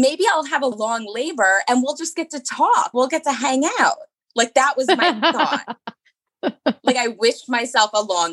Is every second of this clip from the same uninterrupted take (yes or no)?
yes